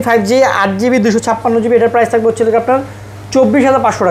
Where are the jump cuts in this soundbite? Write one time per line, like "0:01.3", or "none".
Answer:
none